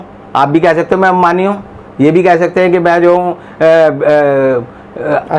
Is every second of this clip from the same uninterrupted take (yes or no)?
yes